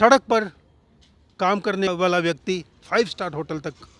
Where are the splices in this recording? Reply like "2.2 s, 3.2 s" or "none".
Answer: 1.9 s